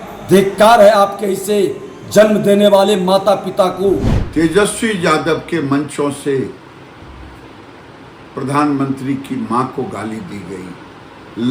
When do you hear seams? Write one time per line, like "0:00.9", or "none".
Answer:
0:04.1